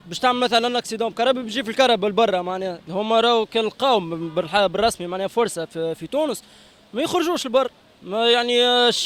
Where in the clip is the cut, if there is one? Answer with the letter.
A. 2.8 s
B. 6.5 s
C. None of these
A